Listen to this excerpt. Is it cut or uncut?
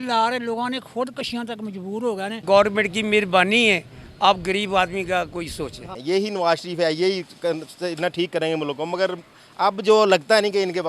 cut